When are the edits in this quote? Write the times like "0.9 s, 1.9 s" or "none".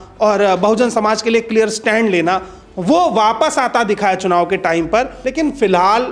5.2 s